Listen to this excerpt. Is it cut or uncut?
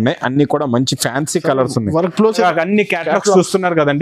cut